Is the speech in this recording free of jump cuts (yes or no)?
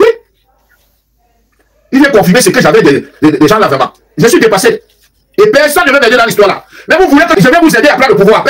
no